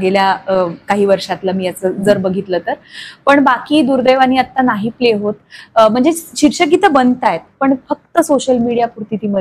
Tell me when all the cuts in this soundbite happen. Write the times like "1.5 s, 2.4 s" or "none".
none

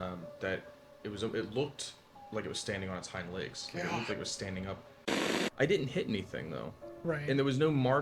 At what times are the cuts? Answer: 5.2 s

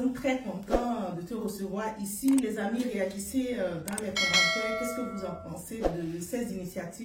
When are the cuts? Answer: 5.9 s

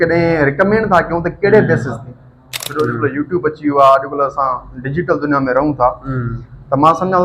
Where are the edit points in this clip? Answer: 2.6 s

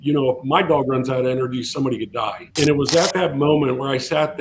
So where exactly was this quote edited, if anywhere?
2.4 s

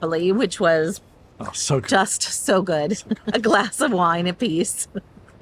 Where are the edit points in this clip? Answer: none

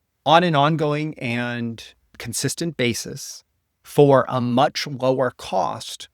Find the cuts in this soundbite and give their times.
2.2 s

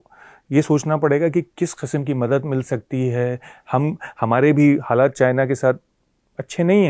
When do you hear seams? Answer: none

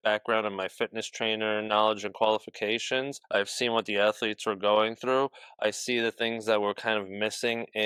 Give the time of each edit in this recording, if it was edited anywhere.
none

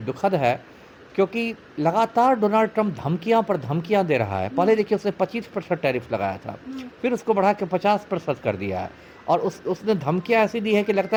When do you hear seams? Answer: none

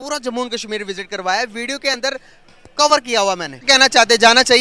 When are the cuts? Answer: 3.7 s

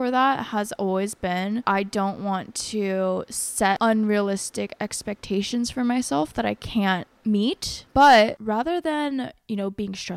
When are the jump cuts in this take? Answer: 1.6 s, 3.8 s, 7.1 s, 8.4 s

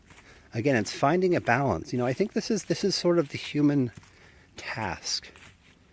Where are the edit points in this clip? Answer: none

